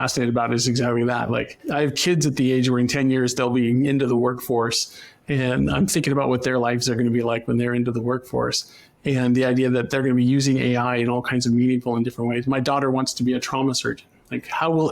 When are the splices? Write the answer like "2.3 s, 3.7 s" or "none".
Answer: 1.6 s